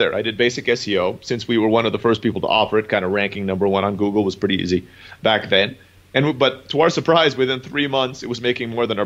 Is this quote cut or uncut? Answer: uncut